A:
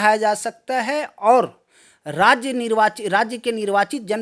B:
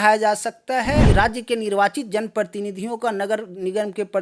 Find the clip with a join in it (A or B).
B